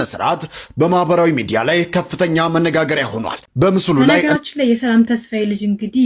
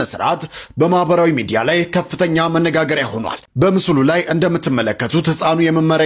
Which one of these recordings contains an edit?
first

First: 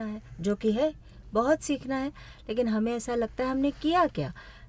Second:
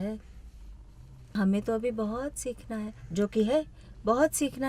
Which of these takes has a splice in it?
second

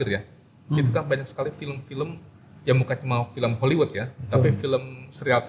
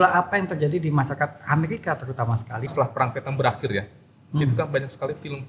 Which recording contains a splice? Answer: second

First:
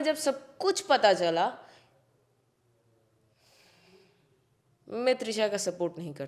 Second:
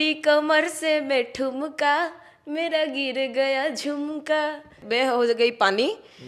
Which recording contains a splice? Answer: second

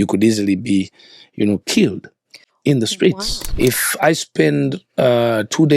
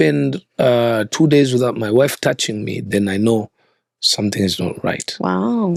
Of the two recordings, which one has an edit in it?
first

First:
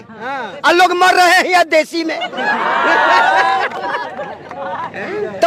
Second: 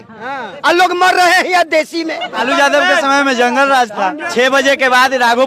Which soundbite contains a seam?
second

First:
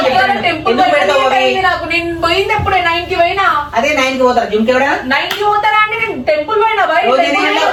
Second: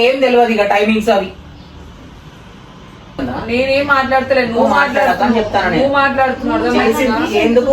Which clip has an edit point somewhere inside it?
second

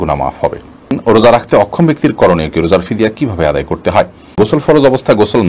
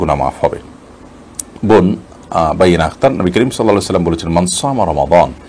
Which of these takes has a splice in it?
first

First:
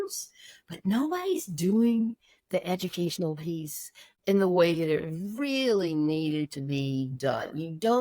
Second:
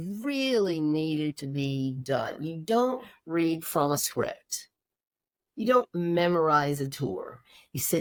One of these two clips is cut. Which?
first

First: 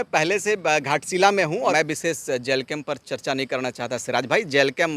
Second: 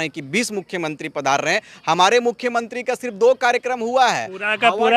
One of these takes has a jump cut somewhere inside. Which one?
first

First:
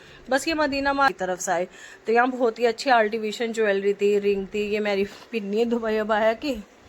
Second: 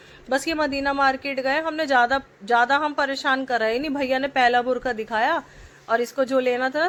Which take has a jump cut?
first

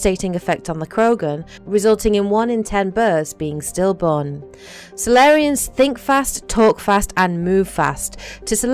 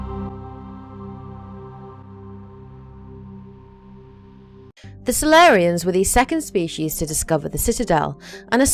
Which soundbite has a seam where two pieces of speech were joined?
first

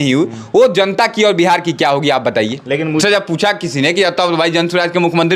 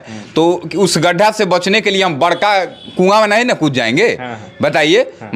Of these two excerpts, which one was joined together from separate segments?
first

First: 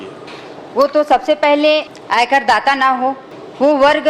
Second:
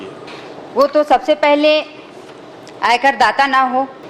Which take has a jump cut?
first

